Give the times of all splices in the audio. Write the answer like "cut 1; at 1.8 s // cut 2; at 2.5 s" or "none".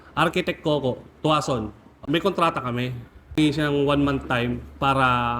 cut 1; at 2.0 s // cut 2; at 3.4 s